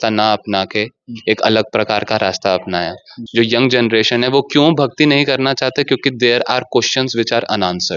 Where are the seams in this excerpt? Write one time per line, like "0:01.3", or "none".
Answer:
0:03.1